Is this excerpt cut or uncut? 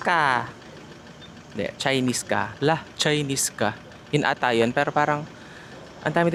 uncut